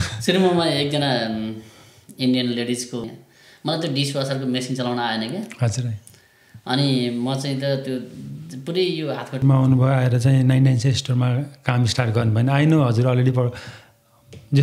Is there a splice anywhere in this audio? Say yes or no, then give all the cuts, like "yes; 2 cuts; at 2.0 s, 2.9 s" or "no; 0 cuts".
yes; 2 cuts; at 3.0 s, 9.4 s